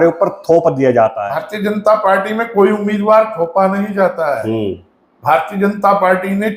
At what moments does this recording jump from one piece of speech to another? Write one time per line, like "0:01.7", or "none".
0:01.2